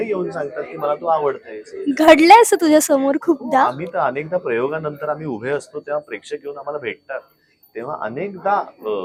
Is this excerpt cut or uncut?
uncut